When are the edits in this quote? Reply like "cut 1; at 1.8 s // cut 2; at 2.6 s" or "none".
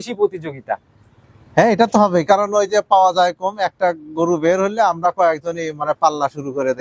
none